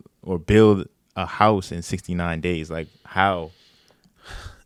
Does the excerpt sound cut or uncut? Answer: uncut